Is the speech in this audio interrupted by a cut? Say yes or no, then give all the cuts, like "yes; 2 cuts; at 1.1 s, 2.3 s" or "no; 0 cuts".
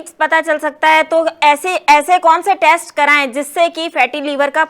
no; 0 cuts